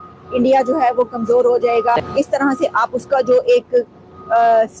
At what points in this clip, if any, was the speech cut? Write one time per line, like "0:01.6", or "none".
0:02.0

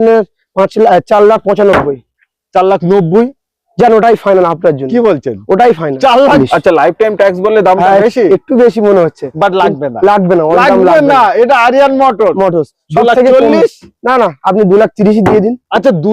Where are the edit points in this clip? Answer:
0:06.4

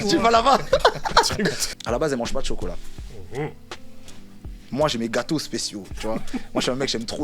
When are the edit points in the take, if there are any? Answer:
0:01.6

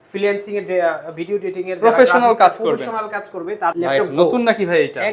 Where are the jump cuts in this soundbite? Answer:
0:03.7

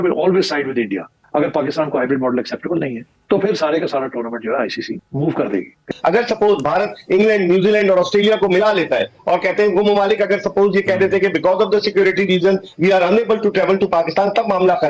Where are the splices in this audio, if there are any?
0:01.2
0:05.9

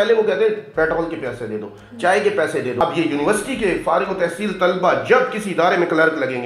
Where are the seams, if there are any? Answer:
0:02.7

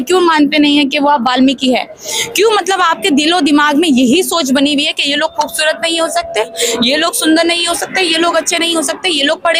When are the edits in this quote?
none

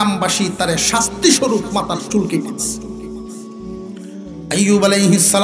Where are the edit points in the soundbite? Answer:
0:02.4
0:04.1

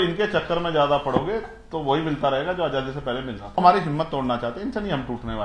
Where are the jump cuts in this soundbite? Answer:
0:03.6

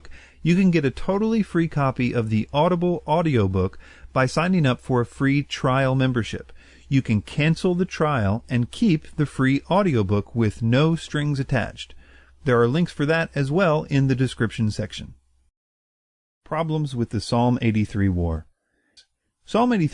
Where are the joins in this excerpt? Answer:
0:05.4

